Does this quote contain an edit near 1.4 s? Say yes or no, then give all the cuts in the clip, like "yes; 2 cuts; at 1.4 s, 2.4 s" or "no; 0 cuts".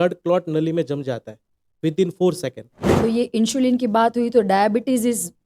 no; 1 cut; at 2.7 s